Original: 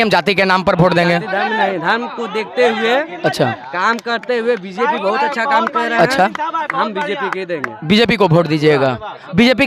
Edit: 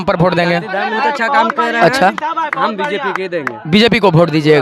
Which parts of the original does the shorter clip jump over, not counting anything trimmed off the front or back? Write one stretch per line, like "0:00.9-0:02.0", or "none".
0:01.6-0:05.1

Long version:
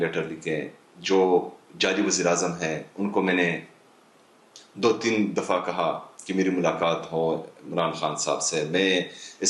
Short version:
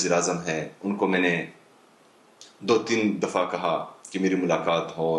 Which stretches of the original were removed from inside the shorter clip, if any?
none

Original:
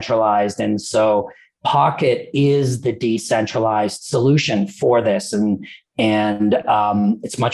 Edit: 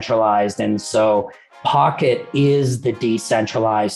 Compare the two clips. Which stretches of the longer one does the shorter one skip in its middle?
none

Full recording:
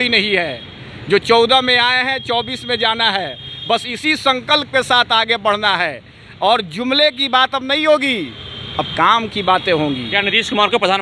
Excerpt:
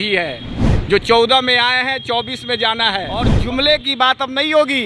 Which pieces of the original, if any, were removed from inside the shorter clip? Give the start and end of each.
0:03.6-0:06.7

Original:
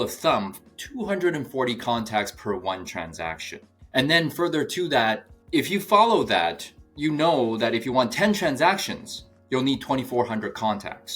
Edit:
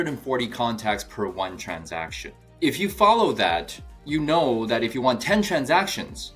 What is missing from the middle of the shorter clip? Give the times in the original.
0:03.7-0:05.3

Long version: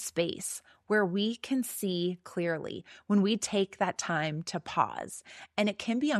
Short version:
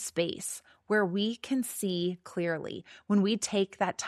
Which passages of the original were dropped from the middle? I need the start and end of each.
none

